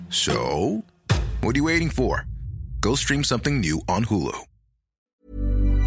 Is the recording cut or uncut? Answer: cut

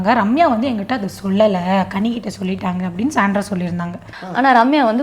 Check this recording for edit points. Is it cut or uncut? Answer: uncut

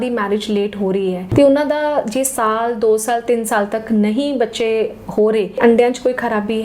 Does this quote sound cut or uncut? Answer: cut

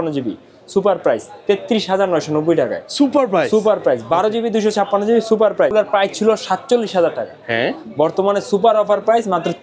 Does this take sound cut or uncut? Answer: cut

